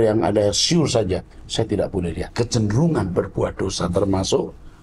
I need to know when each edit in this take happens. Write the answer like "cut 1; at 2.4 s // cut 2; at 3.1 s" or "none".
cut 1; at 2.3 s

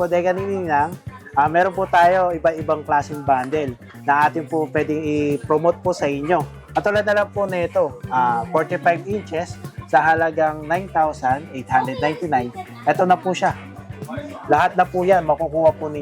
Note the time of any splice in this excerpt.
none

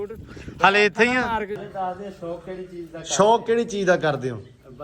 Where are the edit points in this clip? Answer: cut 1; at 1.6 s

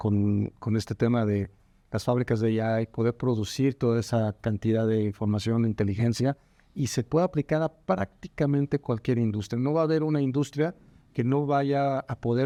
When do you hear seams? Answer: none

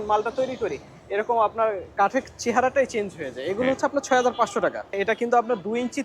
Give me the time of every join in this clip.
cut 1; at 5.0 s

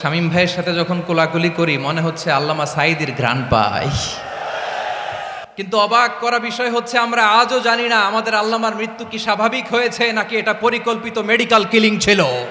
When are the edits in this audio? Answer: cut 1; at 5.4 s

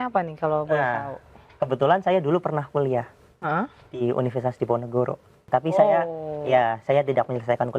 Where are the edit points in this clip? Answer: cut 1; at 5.4 s

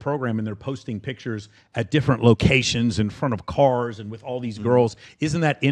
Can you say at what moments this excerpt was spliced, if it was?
none

